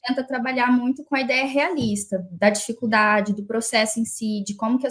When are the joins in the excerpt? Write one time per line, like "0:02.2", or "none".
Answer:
none